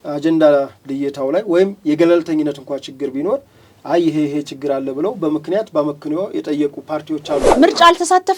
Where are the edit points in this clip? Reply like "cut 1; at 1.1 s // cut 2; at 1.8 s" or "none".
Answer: cut 1; at 7.5 s